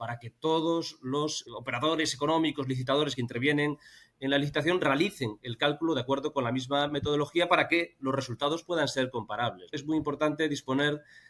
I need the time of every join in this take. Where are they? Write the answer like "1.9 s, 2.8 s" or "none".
1.4 s, 9.8 s